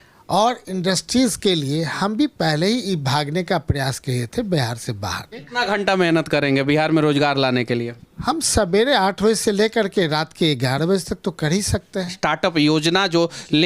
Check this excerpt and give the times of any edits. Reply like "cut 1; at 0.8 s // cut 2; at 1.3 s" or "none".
cut 1; at 5.5 s // cut 2; at 12.1 s